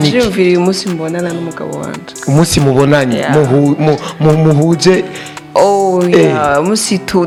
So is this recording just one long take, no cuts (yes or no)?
yes